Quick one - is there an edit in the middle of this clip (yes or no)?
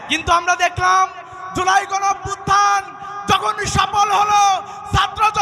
no